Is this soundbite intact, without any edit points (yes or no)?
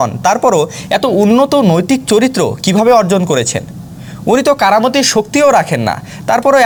yes